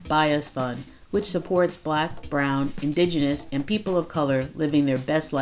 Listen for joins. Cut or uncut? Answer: uncut